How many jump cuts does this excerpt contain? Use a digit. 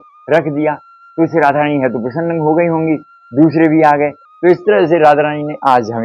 0